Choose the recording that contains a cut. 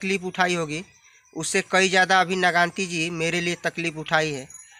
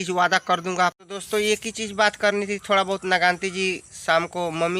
second; 1 cut; at 1.0 s

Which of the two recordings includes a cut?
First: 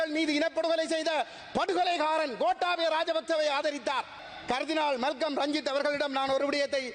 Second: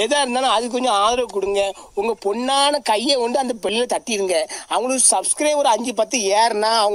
first; 1 cut; at 4.3 s

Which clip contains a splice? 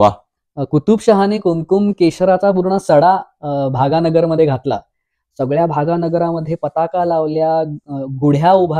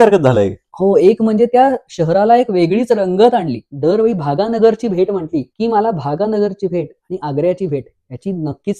second; 2 cuts; at 3.6 s, 5.5 s

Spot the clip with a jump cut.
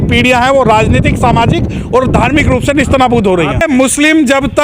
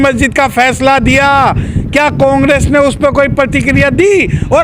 first; 1 cut; at 3.6 s

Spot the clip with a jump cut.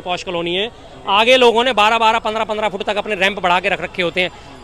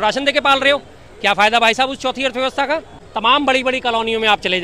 second; 1 cut; at 3.0 s

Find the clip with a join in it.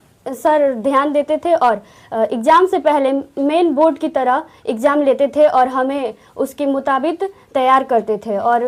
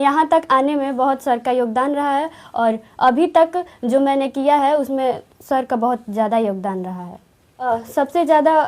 second; 1 cut; at 7.5 s

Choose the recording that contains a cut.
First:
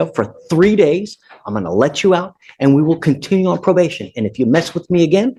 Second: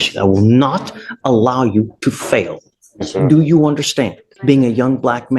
second; 1 cut; at 4.3 s

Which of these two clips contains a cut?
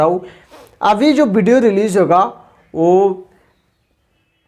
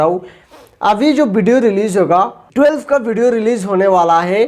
second; 1 cut; at 2.4 s

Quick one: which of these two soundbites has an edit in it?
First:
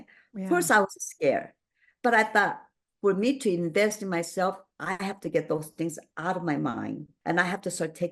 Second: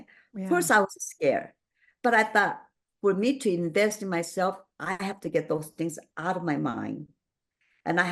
first; 1 cut; at 7.1 s

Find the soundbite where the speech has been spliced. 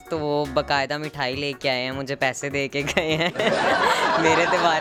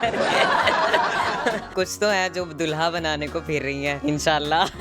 second; 2 cuts; at 1.7 s, 4.0 s

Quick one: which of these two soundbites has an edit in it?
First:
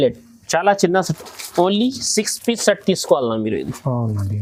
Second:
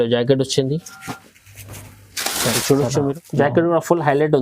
second; 1 cut; at 3.2 s

